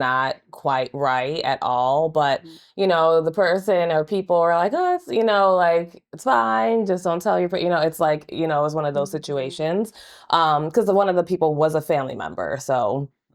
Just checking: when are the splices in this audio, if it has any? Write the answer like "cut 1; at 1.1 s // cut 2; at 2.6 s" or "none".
none